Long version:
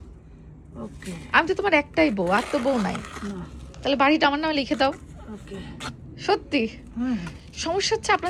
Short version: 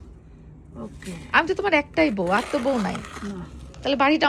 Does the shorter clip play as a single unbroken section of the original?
yes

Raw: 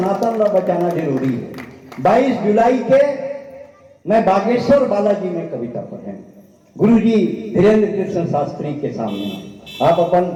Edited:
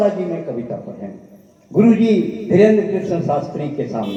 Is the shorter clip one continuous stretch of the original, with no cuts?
yes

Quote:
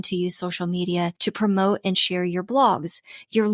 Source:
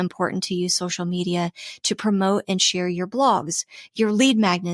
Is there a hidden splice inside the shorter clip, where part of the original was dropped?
yes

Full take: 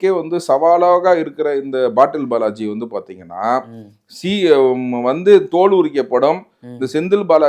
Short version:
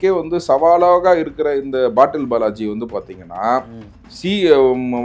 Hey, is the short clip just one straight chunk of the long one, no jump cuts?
yes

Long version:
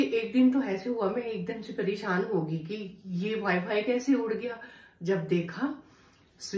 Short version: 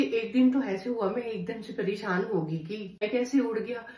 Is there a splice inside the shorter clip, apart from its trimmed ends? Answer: yes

